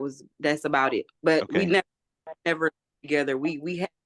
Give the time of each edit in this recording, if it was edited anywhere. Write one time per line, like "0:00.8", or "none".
0:01.1